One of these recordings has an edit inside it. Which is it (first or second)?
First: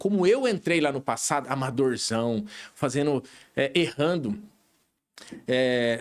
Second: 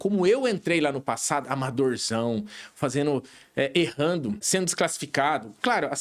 second